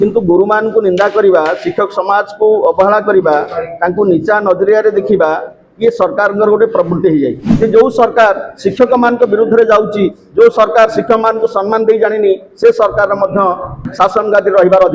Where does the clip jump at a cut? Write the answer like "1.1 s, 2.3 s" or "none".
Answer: 7.5 s